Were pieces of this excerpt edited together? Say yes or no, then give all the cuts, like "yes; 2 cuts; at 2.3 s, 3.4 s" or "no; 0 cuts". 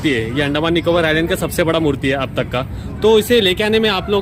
no; 0 cuts